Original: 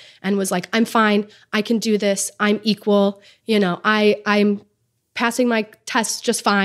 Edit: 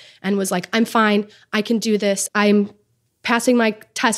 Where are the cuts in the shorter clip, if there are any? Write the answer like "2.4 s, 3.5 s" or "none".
2.3 s